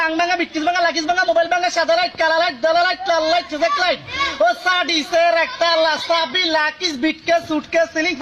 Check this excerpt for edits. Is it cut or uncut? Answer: uncut